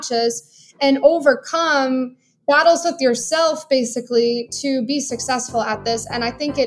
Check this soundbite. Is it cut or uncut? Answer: uncut